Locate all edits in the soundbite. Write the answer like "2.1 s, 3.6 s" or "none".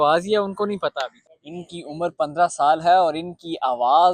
1.2 s